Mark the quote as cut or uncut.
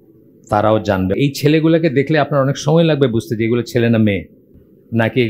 cut